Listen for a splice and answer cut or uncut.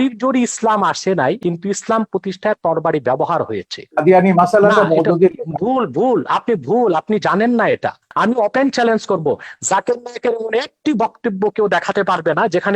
cut